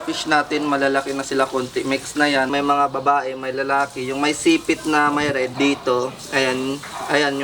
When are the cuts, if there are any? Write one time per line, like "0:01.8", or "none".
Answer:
0:02.5
0:05.5